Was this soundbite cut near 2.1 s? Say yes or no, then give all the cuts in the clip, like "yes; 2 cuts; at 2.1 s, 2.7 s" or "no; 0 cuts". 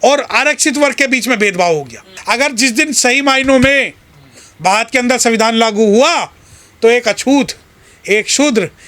yes; 1 cut; at 2.1 s